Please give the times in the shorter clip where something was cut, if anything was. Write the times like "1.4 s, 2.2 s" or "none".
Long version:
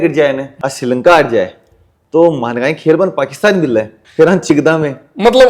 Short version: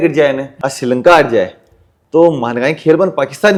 none